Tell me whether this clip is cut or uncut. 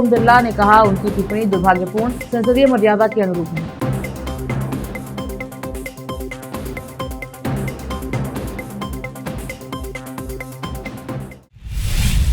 cut